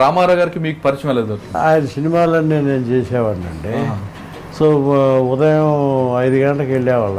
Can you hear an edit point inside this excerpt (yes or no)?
yes